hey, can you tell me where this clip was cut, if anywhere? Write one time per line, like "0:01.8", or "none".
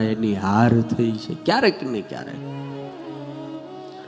none